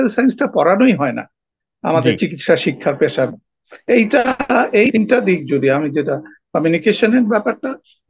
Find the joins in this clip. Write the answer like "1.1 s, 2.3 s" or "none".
none